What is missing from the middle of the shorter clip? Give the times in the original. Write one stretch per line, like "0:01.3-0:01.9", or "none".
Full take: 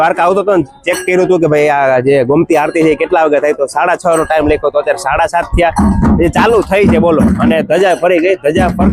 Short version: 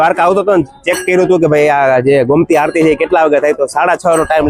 none

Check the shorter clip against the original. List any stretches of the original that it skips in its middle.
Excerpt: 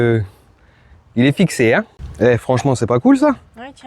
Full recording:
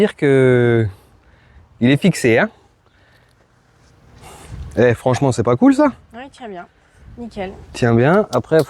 0:02.7-0:04.6

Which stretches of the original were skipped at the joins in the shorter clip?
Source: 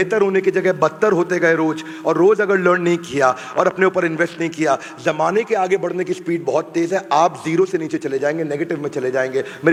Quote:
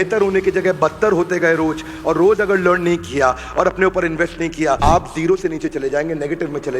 0:04.8-0:07.1

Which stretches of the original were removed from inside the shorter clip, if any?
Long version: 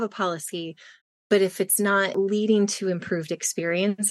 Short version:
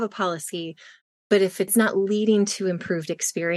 0:01.8-0:02.0

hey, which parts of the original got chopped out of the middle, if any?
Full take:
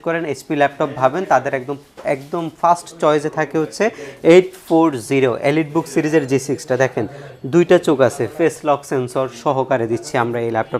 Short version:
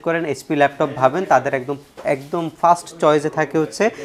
none

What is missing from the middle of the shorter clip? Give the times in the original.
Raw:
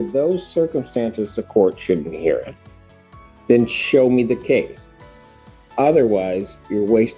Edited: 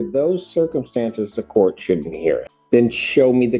0:02.5-0:03.3

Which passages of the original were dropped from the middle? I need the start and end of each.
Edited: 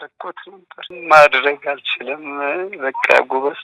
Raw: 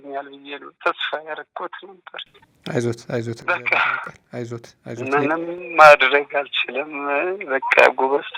0:02.3-0:05.6

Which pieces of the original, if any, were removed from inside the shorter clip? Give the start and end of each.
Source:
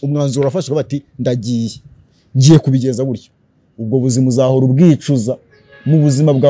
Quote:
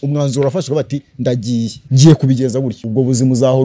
0:01.8-0:02.2
0:03.2-0:03.7

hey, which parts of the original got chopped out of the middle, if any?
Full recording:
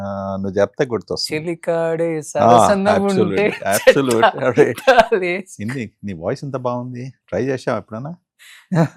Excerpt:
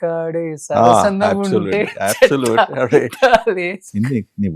none

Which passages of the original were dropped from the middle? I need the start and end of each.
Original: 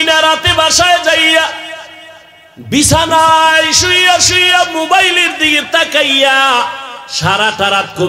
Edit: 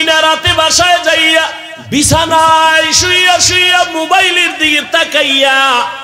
0:01.7-0:02.5

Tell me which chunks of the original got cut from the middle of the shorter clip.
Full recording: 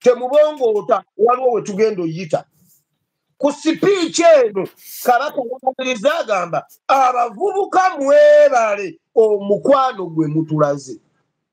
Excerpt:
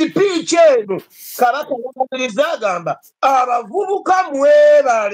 none

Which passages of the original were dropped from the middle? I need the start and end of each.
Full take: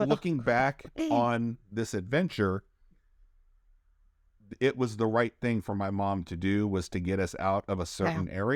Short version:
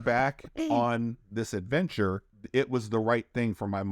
0:02.7-0:04.4

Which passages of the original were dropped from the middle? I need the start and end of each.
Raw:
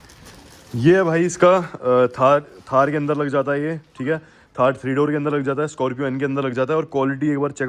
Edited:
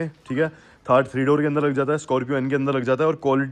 none

